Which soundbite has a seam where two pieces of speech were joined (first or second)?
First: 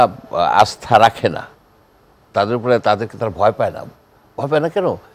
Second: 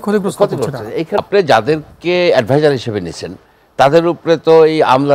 second